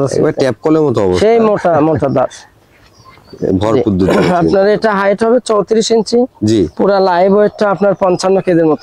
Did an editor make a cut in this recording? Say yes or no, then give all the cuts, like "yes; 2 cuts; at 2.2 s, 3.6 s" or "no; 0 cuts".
no; 0 cuts